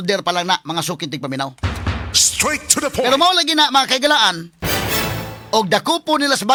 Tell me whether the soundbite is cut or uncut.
uncut